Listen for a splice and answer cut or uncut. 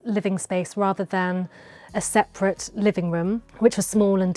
cut